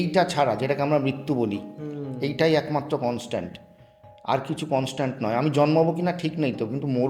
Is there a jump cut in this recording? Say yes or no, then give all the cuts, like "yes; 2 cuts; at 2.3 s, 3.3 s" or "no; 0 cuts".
no; 0 cuts